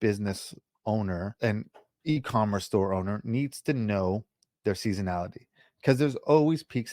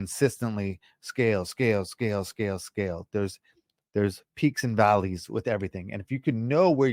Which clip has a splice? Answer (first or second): first